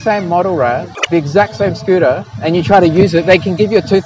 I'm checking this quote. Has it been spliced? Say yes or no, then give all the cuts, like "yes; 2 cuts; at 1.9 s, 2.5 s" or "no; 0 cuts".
yes; 1 cut; at 1.1 s